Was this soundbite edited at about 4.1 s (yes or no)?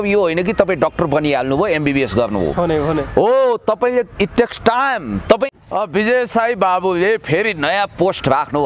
no